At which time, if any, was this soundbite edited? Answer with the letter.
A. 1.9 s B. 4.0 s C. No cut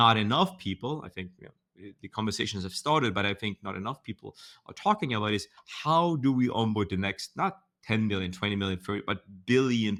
C